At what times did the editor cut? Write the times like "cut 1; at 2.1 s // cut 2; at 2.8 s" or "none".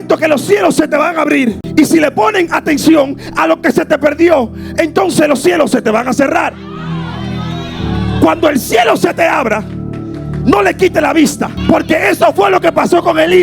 cut 1; at 1.6 s // cut 2; at 11.5 s